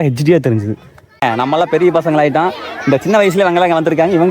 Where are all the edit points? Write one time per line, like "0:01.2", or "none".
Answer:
0:01.2